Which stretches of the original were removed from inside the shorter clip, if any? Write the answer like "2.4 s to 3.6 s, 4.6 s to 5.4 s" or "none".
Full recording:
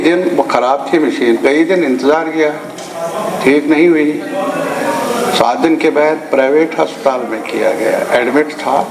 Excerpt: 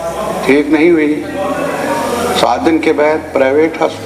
none